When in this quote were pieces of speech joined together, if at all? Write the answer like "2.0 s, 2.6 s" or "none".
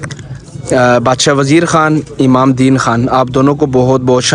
none